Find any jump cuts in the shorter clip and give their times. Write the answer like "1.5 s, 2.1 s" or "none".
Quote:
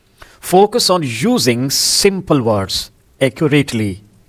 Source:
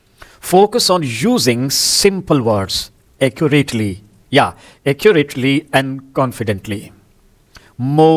none